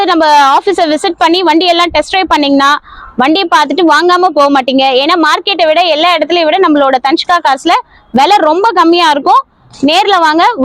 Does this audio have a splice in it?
no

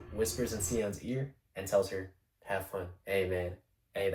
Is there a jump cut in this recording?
no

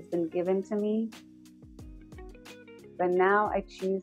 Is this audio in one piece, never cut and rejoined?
no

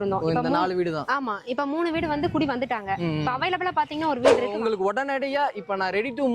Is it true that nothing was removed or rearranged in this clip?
no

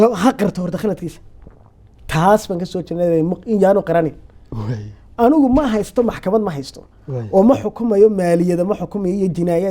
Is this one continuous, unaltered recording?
yes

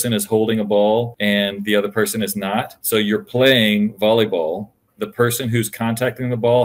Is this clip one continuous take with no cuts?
no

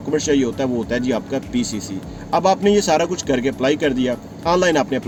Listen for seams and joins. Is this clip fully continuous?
yes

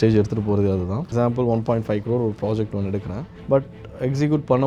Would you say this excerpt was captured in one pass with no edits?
no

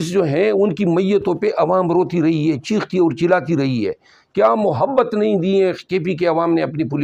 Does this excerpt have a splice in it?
no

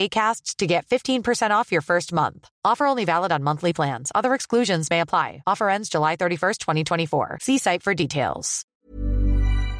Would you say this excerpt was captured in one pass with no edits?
no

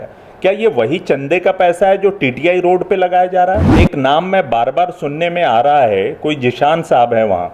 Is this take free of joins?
no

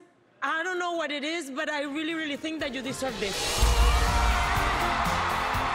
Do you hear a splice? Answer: yes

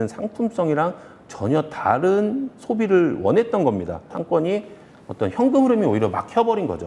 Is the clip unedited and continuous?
no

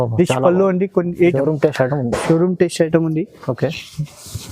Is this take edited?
yes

